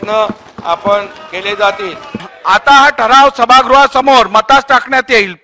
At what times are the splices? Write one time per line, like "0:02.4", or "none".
0:02.3